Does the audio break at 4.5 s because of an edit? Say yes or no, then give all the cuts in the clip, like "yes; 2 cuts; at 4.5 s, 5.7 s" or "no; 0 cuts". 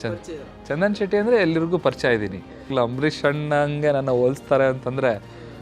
no; 1 cut; at 2.7 s